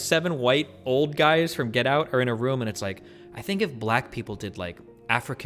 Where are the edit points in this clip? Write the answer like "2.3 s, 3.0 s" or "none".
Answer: none